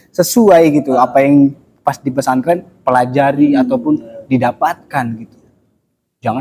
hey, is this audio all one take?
yes; 0 cuts

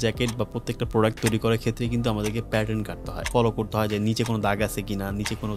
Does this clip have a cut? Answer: yes; 1 cut; at 3.2 s

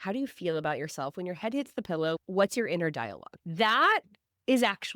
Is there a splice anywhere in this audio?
yes; 1 cut; at 3.3 s

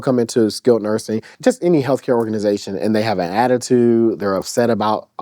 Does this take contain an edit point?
yes; 1 cut; at 1.2 s

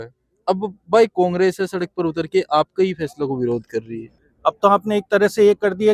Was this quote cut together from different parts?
yes; 1 cut; at 4.2 s

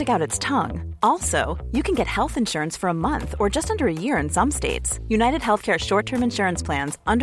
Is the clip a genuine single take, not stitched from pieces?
yes; 0 cuts

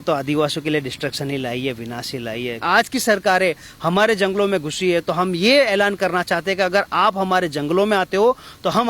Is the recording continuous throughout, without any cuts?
no; 1 cut; at 2.6 s

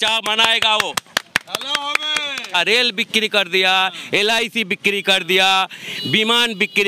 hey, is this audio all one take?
no; 1 cut; at 2.5 s

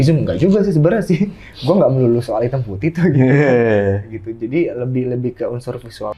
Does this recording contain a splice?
no; 0 cuts

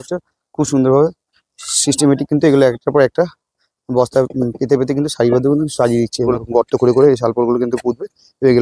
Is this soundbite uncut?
no; 1 cut; at 6.3 s

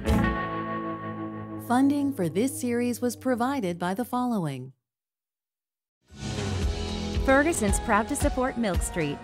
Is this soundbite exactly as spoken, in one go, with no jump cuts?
no; 1 cut; at 1.5 s

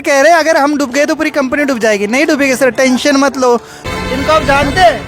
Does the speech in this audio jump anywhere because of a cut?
yes; 1 cut; at 3.8 s

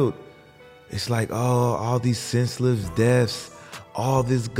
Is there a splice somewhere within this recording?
no; 0 cuts

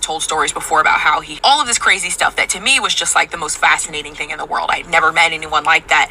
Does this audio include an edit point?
yes; 1 cut; at 1.4 s

